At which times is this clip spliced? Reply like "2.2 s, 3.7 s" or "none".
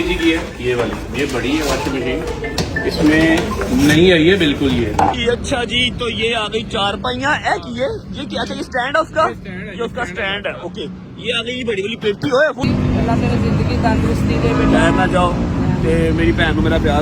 5.1 s, 12.6 s